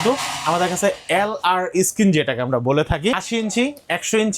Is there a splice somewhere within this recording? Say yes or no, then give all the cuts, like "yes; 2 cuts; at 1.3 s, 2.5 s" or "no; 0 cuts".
yes; 1 cut; at 3.2 s